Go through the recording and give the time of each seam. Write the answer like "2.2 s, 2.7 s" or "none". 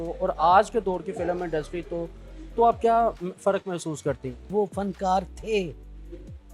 4.5 s